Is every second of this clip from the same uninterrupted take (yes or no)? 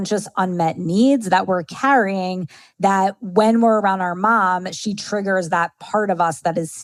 yes